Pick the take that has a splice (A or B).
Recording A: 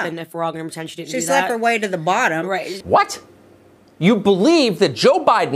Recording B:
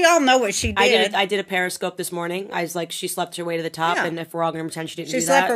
A